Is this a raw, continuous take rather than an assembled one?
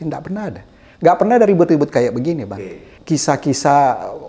no; 1 cut; at 2.9 s

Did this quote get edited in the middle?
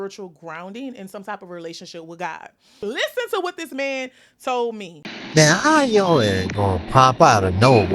yes; 1 cut; at 2.8 s

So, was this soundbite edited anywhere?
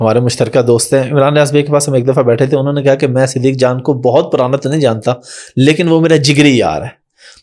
no; 0 cuts

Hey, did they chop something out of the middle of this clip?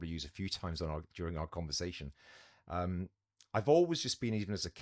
no; 0 cuts

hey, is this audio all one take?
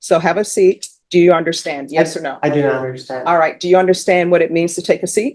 no; 1 cut; at 0.9 s

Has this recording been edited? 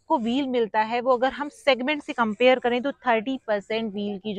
no; 0 cuts

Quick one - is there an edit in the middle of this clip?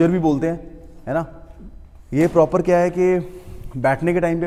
no; 0 cuts

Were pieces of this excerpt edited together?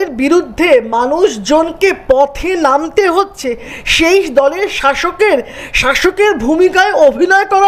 no; 0 cuts

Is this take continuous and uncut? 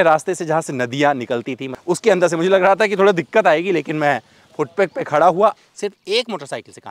no; 2 cuts; at 1.7 s, 5.5 s

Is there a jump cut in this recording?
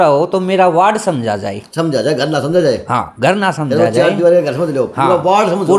no; 0 cuts

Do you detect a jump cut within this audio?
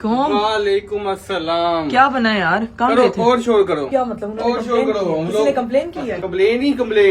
yes; 2 cuts; at 3.9 s, 6.2 s

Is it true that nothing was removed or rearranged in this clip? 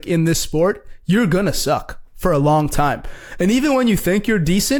yes; 0 cuts

